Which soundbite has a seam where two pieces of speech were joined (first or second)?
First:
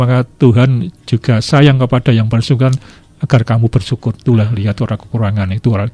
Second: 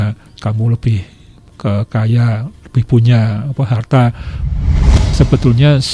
second